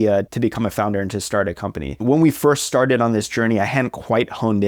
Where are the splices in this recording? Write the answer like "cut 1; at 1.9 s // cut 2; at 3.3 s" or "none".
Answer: cut 1; at 2.0 s